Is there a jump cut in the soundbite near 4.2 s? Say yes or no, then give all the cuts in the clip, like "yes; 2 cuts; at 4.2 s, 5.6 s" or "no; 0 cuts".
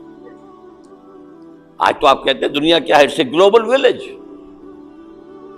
yes; 1 cut; at 4.2 s